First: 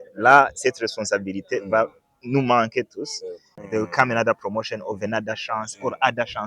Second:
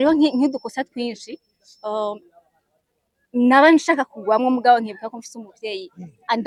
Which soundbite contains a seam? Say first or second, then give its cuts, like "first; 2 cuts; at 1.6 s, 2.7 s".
first; 1 cut; at 3.5 s